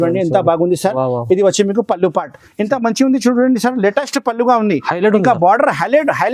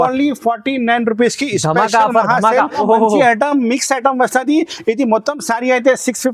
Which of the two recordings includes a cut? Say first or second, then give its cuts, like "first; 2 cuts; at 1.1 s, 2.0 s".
second; 1 cut; at 2.8 s